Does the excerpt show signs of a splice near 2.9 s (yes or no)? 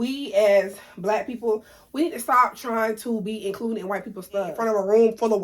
no